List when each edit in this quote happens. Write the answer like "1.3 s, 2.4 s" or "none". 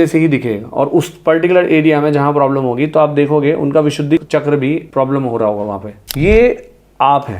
4.2 s, 6.0 s